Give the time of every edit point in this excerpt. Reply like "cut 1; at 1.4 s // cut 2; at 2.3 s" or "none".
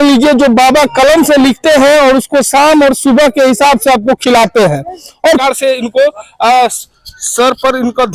cut 1; at 5.4 s